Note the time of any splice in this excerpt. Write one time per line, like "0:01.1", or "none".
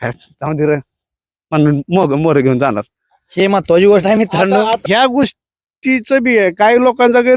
0:04.8